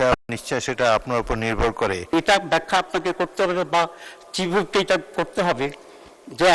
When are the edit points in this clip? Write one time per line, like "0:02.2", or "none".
0:02.1